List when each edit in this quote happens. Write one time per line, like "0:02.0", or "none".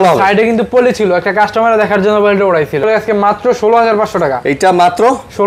0:02.8